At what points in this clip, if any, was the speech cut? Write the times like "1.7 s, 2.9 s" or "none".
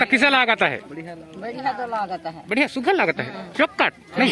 none